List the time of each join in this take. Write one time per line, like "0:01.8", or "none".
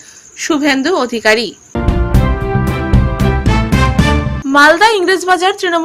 0:01.7
0:04.4